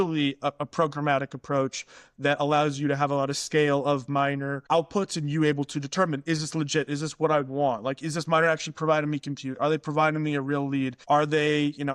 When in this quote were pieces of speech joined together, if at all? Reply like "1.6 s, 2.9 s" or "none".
4.6 s, 11.0 s